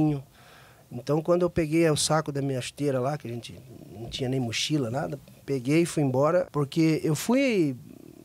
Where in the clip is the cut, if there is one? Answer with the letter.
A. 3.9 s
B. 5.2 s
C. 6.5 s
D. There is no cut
C